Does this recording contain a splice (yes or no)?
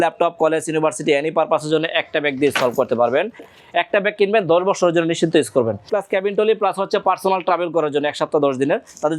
yes